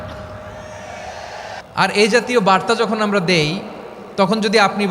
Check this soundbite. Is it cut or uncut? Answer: cut